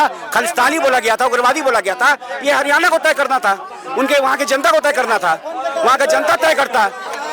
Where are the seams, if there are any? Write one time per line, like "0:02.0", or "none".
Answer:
none

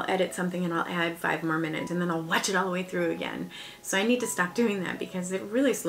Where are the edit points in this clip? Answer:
0:01.9

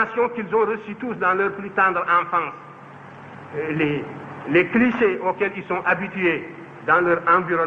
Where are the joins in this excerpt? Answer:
none

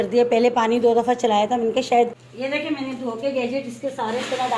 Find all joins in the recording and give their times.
0:02.3

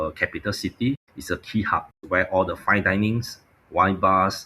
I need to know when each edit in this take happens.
0:01.1
0:02.0

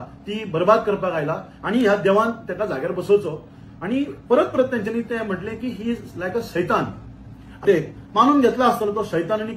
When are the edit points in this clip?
0:07.6

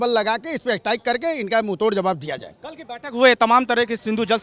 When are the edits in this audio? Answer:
none

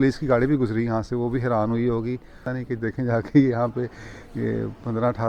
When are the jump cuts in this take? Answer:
0:02.5

